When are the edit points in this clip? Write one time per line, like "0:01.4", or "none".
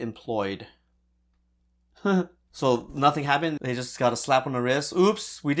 0:03.6